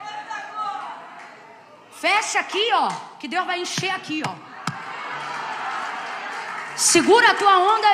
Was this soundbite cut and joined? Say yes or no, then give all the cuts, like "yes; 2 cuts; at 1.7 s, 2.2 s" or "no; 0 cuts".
no; 0 cuts